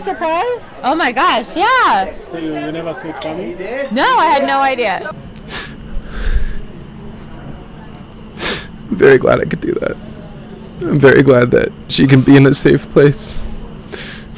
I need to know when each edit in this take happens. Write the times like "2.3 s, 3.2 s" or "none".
2.2 s, 5.1 s